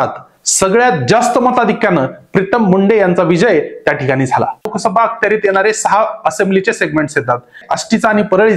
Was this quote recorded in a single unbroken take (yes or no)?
no